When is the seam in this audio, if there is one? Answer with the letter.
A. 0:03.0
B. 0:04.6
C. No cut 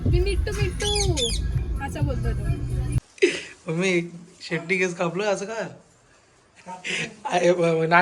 A